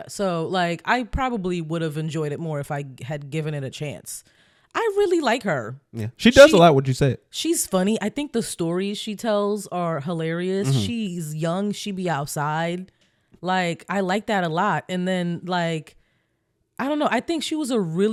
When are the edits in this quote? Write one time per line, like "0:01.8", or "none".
none